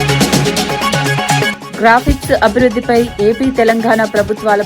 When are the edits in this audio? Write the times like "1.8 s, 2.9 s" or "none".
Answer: 1.6 s